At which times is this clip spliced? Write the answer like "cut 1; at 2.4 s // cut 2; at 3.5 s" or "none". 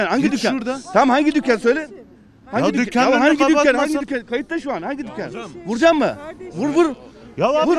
none